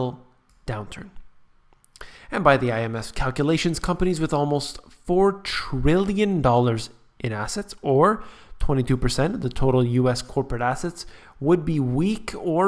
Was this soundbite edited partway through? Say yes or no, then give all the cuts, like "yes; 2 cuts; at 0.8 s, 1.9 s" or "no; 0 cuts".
no; 0 cuts